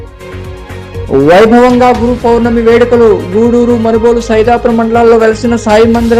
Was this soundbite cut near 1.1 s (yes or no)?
yes